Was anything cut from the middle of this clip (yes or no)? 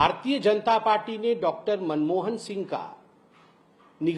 no